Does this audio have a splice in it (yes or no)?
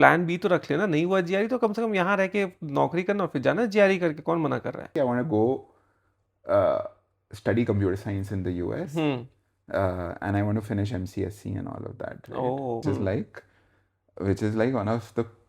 yes